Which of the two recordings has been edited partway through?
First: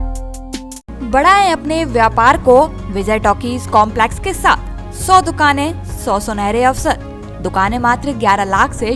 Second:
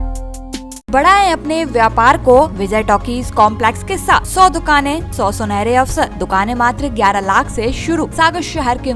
second; 6 cuts; at 0.9 s, 2.6 s, 4.3 s, 5.1 s, 6.2 s, 8.1 s

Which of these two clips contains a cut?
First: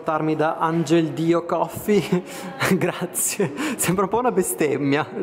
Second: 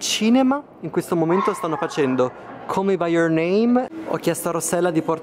second; 1 cut; at 3.9 s

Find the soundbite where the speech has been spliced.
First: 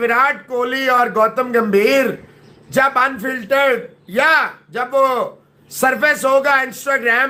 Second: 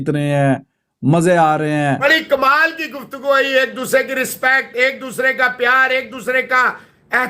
second; 1 cut; at 2.1 s

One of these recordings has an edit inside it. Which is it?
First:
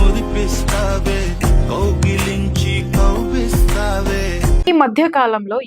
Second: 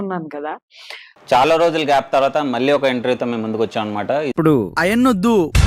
first; 1 cut; at 4.7 s

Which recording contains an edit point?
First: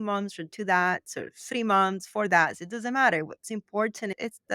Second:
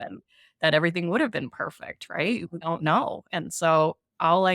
second; 1 cut; at 2.5 s

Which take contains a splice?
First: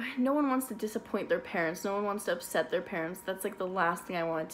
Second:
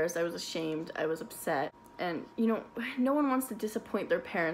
second; 1 cut; at 1.8 s

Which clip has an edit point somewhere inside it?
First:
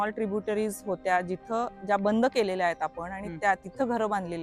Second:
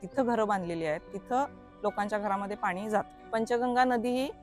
second; 1 cut; at 3.2 s

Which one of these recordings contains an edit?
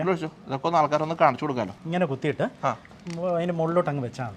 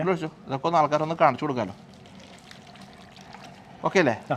first; 1 cut; at 1.8 s

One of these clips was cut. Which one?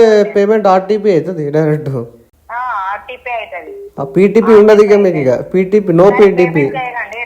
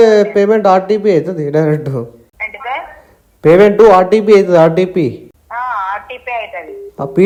first; 1 cut; at 2.3 s

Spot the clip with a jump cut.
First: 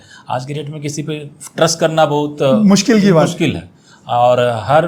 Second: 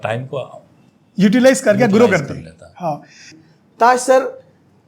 second; 1 cut; at 3.3 s

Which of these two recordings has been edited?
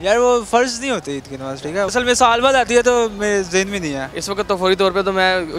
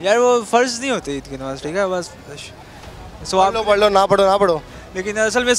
first; 2 cuts; at 1.9 s, 4.1 s

